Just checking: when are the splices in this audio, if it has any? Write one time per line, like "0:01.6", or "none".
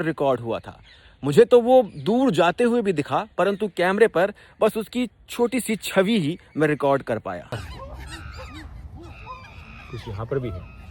0:07.5